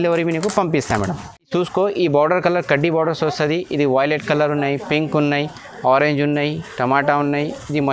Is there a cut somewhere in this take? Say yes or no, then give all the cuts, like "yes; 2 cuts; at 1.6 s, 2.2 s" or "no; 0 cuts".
yes; 1 cut; at 1.5 s